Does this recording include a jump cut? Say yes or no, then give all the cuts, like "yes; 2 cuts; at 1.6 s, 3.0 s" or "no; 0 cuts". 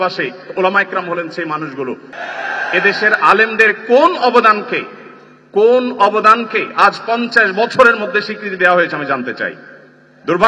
yes; 1 cut; at 2.1 s